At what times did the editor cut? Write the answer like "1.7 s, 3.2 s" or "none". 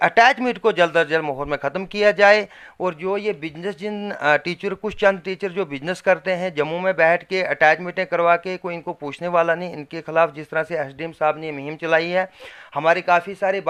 none